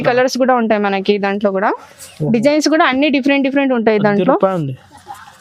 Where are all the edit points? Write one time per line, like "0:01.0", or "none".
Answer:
none

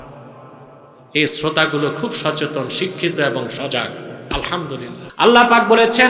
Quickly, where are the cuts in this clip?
0:05.0

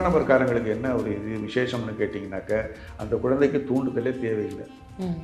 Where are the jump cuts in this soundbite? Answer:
none

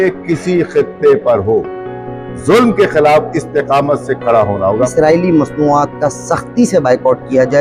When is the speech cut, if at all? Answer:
0:04.9

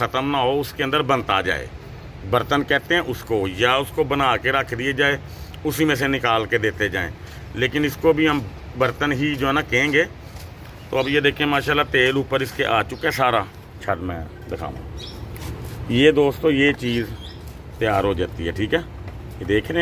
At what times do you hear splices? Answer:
none

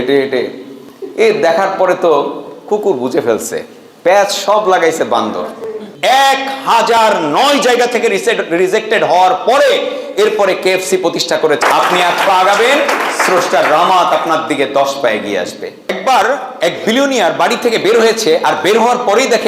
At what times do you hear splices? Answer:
0:05.8
0:11.6
0:16.0

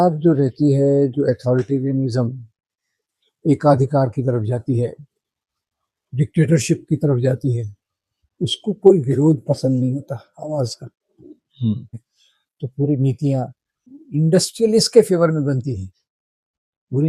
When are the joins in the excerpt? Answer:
0:11.9
0:13.9

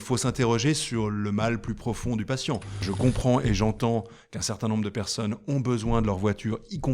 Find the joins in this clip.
0:02.8

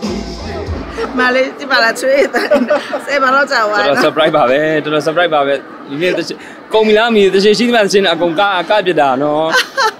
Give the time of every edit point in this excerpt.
0:01.0

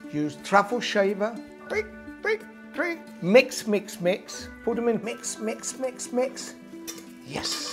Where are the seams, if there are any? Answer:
none

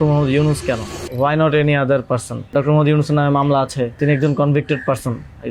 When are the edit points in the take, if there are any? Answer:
0:01.0
0:02.5
0:04.0

